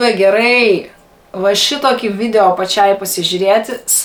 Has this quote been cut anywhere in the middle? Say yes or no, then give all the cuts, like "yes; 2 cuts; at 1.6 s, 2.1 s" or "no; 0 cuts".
no; 0 cuts